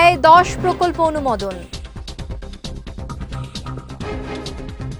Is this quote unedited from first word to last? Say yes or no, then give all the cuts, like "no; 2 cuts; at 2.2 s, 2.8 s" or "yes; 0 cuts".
no; 1 cut; at 1.6 s